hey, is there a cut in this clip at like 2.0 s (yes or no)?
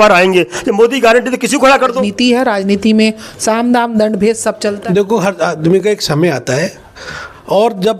yes